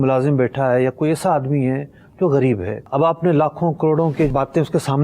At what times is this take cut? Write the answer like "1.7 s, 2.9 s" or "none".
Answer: 2.8 s, 4.3 s